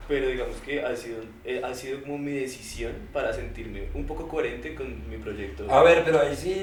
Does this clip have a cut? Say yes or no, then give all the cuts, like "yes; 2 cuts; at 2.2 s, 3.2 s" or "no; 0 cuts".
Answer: no; 0 cuts